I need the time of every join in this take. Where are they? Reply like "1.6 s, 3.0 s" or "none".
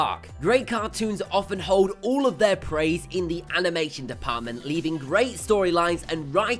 none